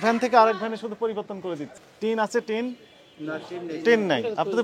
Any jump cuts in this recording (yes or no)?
yes